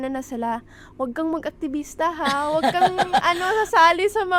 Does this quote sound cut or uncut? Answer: uncut